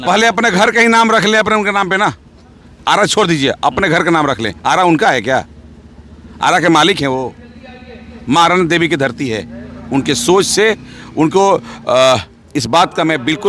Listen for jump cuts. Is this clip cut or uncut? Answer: uncut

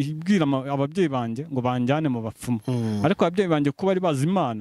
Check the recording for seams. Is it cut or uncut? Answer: uncut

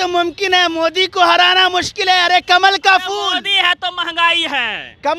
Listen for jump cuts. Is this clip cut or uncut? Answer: uncut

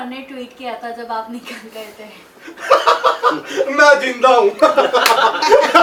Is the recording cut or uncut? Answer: uncut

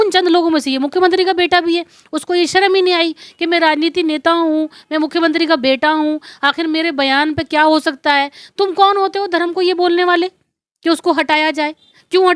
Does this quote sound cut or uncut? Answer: uncut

